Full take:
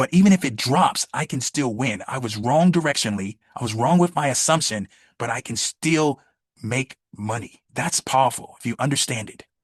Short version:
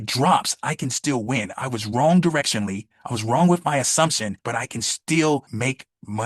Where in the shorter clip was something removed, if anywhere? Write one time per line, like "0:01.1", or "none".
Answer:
0:04.3
0:05.5